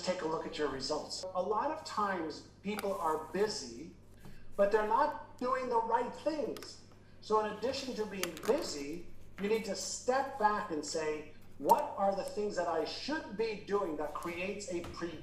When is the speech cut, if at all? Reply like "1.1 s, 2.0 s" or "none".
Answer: 1.3 s